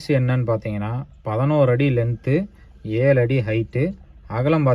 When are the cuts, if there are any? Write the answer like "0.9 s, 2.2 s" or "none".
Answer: none